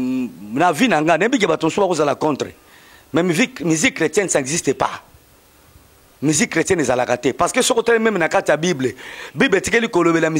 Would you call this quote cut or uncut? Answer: uncut